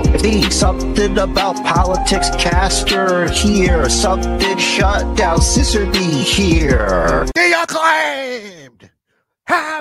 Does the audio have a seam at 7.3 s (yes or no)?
yes